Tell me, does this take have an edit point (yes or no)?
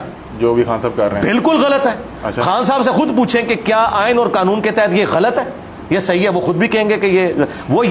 no